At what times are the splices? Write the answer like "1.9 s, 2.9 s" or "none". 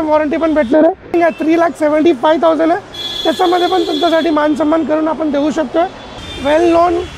1.1 s, 6.2 s